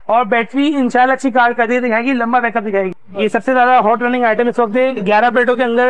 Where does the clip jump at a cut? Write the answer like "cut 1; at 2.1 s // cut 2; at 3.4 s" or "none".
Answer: cut 1; at 2.9 s